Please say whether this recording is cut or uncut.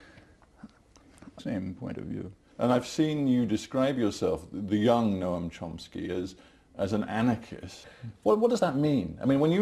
uncut